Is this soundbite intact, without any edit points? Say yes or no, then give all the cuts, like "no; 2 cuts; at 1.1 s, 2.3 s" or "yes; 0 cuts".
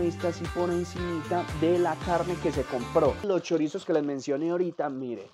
no; 1 cut; at 3.2 s